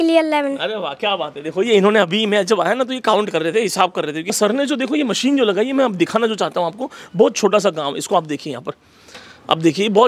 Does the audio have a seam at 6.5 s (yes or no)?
no